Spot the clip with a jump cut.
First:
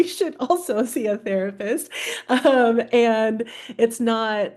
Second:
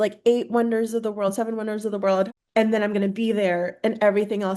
second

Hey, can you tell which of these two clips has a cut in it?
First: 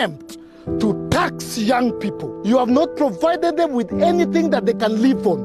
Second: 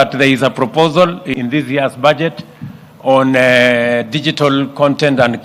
second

